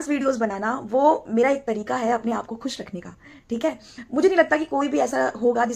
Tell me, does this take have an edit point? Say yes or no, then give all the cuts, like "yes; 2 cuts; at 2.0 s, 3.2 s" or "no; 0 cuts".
no; 0 cuts